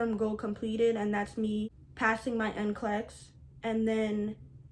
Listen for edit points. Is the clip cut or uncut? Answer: cut